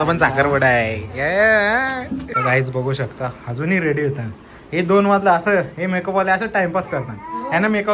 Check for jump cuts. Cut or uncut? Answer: cut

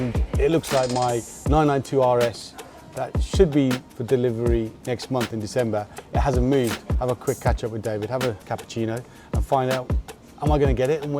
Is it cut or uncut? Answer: cut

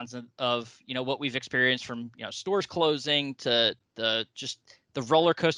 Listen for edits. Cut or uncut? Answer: uncut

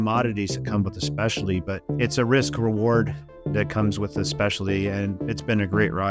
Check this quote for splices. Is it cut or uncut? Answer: cut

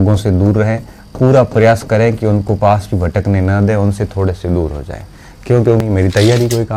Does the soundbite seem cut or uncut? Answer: cut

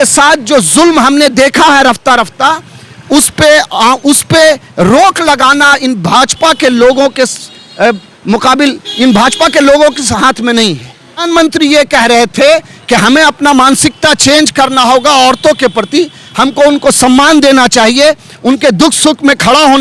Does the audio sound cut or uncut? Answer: cut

